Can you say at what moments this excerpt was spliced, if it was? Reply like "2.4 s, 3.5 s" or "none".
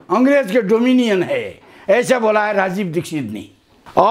none